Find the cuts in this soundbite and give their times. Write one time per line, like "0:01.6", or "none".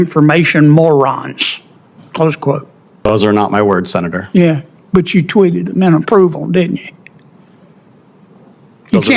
0:03.1